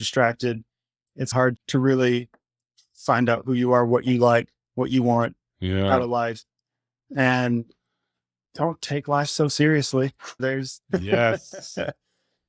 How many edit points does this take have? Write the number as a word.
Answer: zero